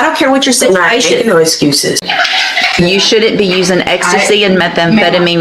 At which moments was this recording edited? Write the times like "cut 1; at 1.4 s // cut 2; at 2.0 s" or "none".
cut 1; at 2.0 s